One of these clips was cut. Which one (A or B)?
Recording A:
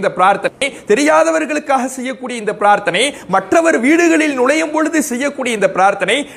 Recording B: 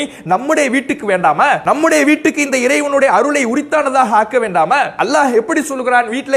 B